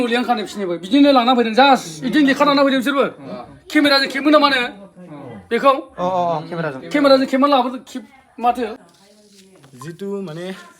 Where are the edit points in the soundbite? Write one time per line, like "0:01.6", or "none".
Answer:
0:08.8